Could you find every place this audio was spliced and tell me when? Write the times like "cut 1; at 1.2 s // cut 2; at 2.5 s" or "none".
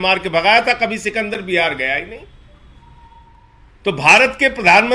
cut 1; at 3.4 s